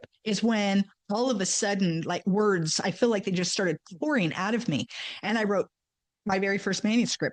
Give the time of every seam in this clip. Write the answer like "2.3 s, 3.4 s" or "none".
none